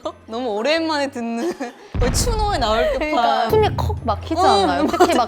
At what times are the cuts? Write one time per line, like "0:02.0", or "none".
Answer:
0:03.5